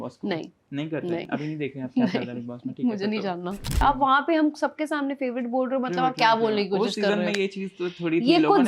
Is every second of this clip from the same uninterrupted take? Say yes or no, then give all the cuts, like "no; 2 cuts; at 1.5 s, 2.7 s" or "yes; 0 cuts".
no; 1 cut; at 3.8 s